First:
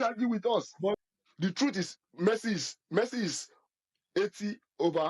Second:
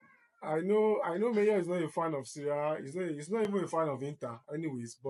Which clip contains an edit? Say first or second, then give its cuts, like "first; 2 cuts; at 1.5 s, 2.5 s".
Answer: first; 1 cut; at 1.0 s